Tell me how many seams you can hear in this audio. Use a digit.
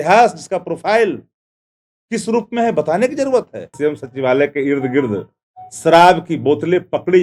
1